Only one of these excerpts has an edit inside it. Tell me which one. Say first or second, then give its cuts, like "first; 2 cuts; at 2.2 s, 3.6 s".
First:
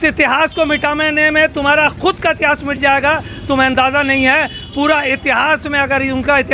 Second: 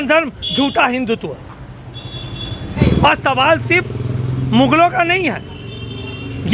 second; 1 cut; at 2.8 s